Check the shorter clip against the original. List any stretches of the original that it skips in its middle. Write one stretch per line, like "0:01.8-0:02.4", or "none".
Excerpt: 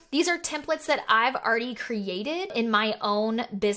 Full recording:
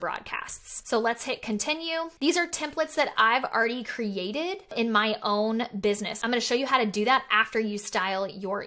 0:04.6-0:04.7